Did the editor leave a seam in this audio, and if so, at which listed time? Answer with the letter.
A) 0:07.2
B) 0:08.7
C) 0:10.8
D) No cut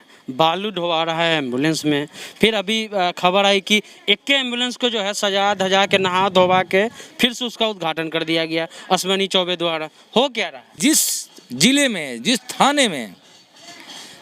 C